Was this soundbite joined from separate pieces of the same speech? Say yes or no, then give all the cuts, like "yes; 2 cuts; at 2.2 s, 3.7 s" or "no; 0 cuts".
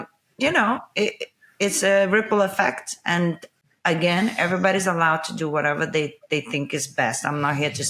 no; 0 cuts